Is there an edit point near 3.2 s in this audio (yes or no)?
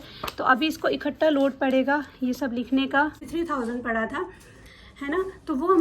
yes